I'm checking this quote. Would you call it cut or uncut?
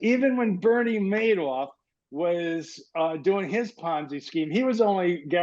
uncut